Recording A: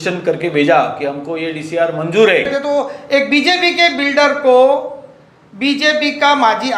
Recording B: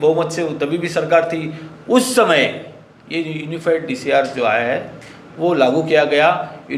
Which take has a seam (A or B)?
A